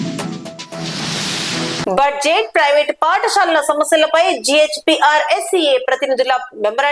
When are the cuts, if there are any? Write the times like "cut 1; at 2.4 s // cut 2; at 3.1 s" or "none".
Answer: cut 1; at 1.5 s